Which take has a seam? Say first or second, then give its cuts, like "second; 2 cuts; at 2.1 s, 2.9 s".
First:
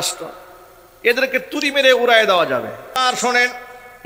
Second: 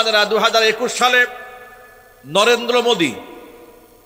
first; 1 cut; at 3.0 s